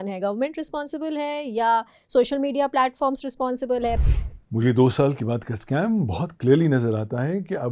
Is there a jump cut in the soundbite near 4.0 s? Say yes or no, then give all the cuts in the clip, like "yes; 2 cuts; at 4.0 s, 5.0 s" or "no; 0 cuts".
yes; 1 cut; at 4.0 s